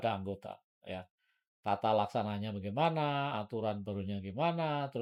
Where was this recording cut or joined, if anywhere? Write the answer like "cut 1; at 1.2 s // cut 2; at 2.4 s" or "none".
none